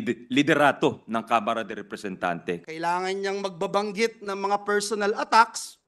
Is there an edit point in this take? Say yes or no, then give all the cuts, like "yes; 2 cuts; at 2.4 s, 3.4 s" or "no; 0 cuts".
yes; 1 cut; at 2.6 s